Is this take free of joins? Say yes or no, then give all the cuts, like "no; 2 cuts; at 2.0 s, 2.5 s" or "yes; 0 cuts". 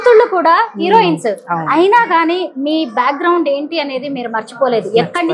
yes; 0 cuts